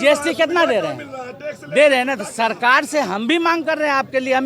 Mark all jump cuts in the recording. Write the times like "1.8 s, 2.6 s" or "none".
none